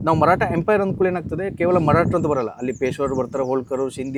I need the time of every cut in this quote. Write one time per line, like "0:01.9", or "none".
none